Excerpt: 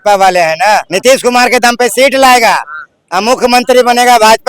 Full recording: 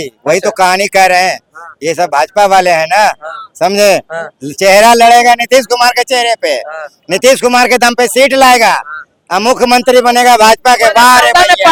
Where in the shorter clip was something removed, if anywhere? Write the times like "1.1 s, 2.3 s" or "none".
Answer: 0.9 s

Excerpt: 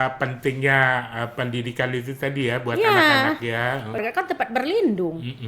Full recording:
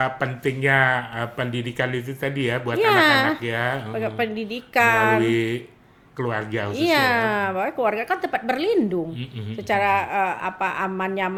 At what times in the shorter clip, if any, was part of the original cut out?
4.0 s

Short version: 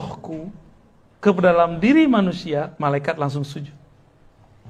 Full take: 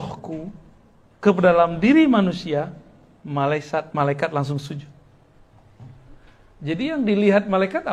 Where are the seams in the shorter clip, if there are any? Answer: 2.7 s

